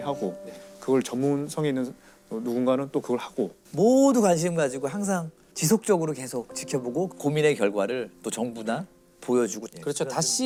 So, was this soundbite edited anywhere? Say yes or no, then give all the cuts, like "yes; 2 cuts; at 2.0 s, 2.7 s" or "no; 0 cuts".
no; 0 cuts